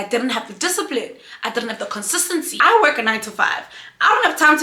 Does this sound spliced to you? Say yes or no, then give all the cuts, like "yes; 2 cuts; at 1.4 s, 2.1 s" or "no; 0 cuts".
yes; 1 cut; at 2.5 s